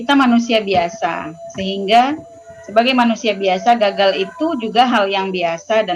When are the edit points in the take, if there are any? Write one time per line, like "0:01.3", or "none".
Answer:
none